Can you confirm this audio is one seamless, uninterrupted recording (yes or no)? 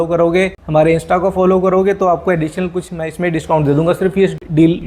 yes